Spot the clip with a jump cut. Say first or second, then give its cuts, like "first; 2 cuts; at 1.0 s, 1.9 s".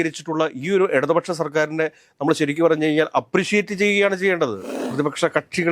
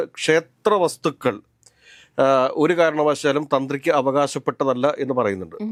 first; 1 cut; at 4.7 s